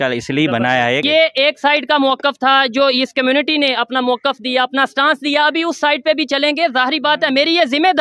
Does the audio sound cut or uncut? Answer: cut